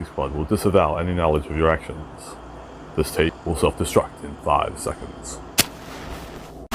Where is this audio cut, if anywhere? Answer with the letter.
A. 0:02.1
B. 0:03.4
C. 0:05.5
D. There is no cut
B